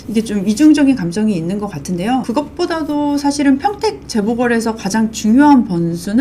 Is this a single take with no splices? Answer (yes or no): no